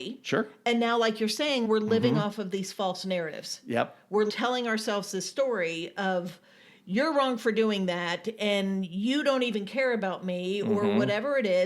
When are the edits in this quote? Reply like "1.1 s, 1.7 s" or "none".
1.6 s